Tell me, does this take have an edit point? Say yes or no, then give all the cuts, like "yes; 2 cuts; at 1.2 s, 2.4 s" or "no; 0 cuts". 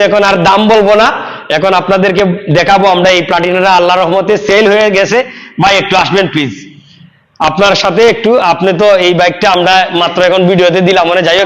no; 0 cuts